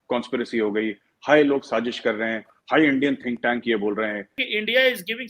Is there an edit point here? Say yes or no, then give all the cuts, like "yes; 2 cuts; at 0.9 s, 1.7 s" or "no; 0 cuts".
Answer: yes; 2 cuts; at 2.5 s, 4.4 s